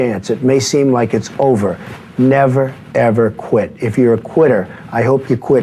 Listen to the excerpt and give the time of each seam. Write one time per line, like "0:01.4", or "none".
none